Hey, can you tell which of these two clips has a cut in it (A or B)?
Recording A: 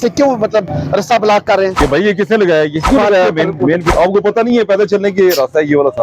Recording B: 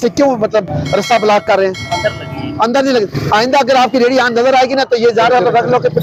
A